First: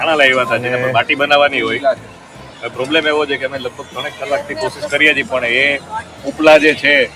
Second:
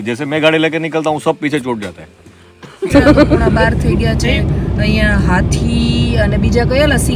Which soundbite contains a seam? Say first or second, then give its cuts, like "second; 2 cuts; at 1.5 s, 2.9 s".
second; 1 cut; at 3.4 s